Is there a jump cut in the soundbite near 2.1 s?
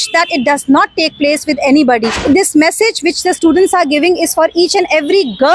yes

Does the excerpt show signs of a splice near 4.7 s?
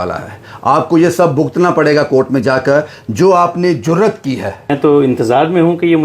yes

